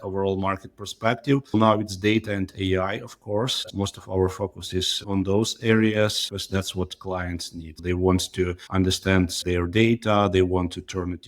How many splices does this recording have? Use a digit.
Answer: 3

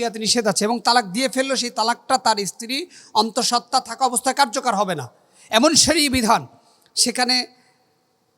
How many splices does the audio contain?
0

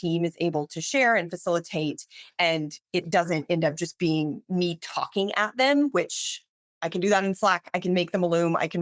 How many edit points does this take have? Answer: 0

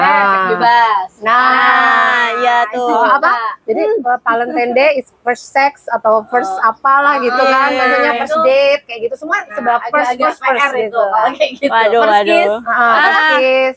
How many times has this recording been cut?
0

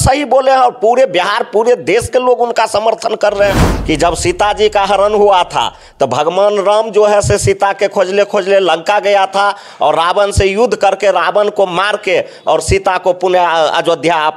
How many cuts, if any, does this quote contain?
1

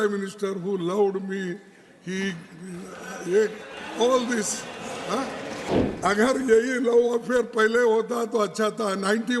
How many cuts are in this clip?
1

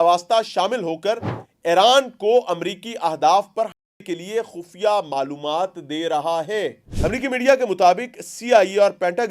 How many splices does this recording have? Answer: 1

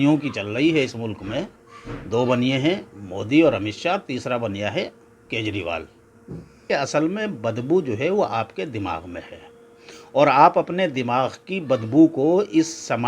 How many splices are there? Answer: 1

